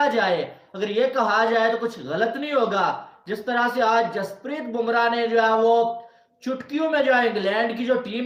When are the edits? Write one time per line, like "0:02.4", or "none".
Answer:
none